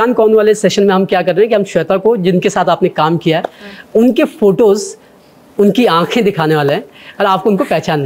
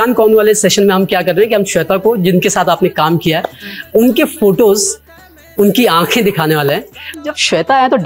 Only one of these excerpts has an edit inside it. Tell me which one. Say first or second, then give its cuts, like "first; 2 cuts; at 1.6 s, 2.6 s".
second; 1 cut; at 7.2 s